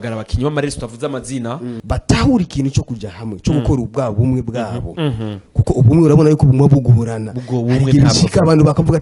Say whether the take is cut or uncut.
cut